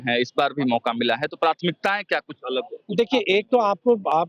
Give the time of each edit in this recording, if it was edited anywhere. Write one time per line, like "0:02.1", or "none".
none